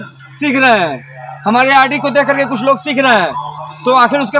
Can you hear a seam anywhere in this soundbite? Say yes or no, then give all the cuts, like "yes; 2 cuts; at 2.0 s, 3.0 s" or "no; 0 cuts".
no; 0 cuts